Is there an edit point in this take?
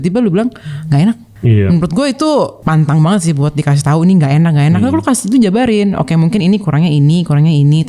yes; 2 cuts; at 1.3 s, 2.6 s

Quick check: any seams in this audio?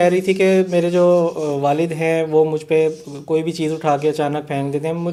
no; 0 cuts

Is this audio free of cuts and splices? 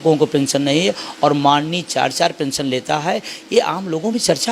yes; 0 cuts

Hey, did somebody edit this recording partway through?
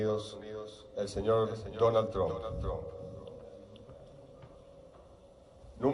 no; 0 cuts

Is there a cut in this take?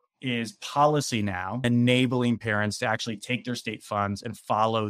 yes; 1 cut; at 1.6 s

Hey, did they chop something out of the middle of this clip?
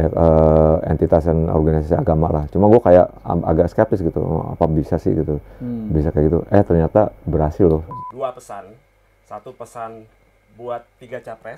yes; 1 cut; at 7.9 s

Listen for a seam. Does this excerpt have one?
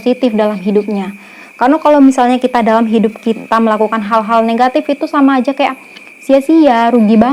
no; 0 cuts

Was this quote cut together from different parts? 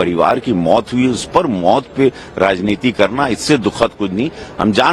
no; 0 cuts

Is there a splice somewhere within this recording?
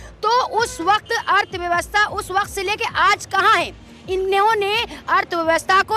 no; 0 cuts

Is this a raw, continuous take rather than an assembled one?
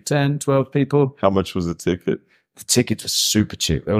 yes; 0 cuts

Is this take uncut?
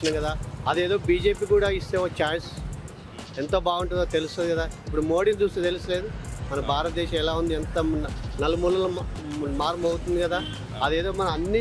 yes; 0 cuts

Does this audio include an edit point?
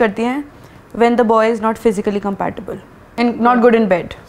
yes; 1 cut; at 3.0 s

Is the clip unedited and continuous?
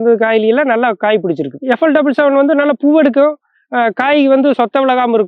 no; 1 cut; at 1.5 s

